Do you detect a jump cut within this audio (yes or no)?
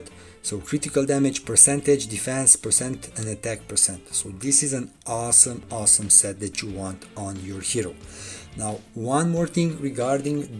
no